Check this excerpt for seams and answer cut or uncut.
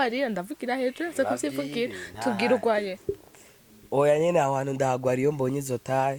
uncut